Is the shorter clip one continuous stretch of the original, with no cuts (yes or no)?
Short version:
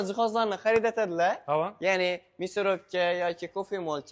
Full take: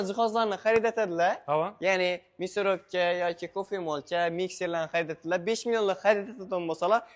yes